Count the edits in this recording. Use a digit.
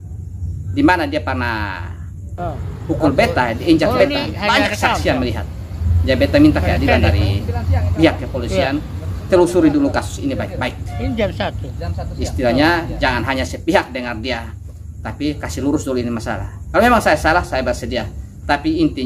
0